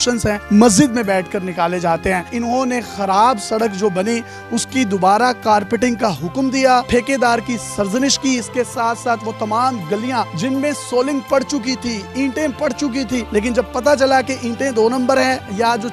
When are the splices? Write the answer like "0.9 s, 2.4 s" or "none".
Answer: none